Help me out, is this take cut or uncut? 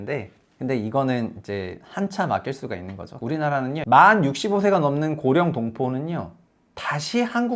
cut